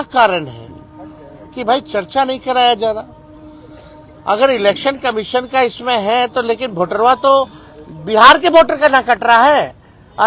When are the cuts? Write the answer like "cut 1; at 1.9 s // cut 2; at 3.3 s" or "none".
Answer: none